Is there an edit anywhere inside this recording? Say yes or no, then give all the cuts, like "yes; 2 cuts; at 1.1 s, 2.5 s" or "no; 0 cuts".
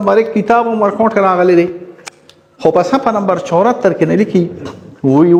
no; 0 cuts